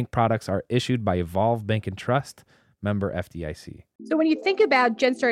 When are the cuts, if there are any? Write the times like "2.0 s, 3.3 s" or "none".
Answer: none